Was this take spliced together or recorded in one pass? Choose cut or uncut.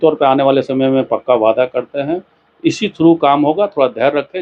uncut